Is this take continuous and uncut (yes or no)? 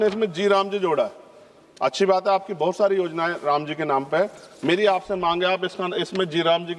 yes